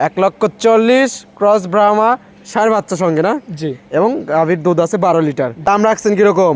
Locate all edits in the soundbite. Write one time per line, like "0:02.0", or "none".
0:05.6

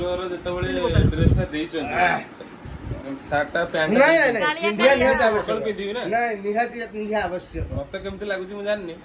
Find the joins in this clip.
none

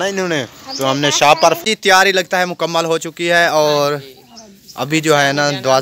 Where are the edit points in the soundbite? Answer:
0:01.6

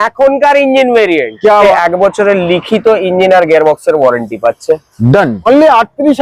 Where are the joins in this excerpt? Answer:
0:01.6
0:05.5

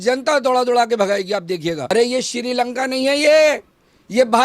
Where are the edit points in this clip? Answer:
0:01.9

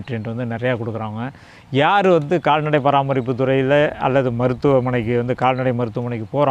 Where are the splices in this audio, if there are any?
none

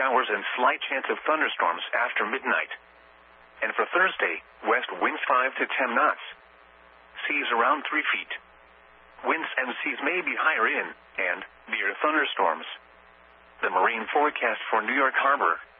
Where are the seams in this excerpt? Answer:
none

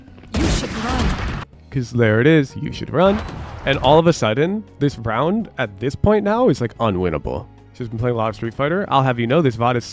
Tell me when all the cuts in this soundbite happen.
0:07.4

